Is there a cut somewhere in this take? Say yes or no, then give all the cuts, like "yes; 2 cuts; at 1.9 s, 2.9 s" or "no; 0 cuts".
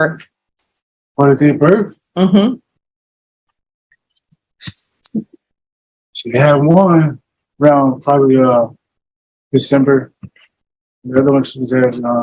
no; 0 cuts